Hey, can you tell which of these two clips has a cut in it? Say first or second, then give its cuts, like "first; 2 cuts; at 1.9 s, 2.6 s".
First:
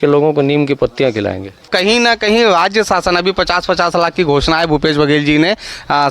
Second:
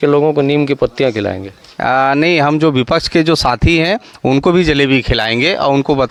first; 1 cut; at 1.7 s